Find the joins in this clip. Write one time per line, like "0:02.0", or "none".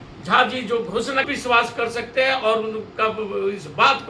0:01.3

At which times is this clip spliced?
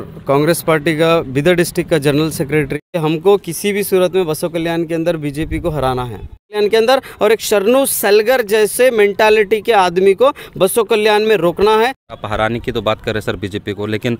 0:03.0
0:06.6
0:12.0

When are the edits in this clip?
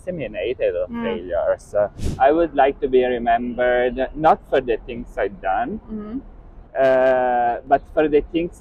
0:02.2

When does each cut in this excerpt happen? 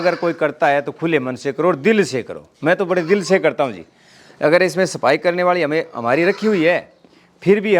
none

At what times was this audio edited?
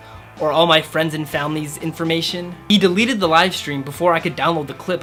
none

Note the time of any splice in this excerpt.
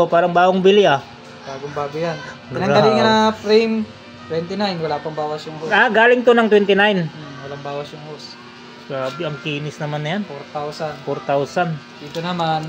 none

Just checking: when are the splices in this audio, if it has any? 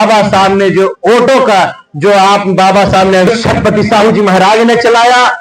0:03.3

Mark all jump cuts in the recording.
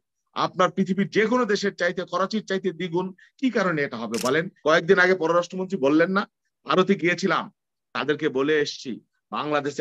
0:04.5

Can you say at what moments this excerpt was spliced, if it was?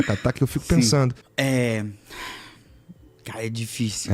0:01.2

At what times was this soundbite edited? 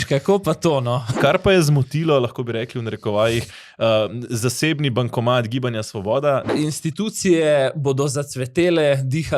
0:01.1
0:06.5

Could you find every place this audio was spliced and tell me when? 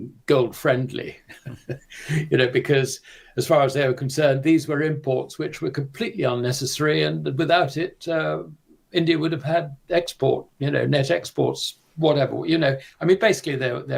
none

